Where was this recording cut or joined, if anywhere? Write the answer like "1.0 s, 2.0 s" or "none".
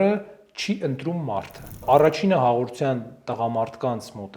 1.8 s